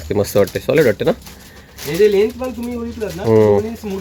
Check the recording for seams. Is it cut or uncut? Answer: uncut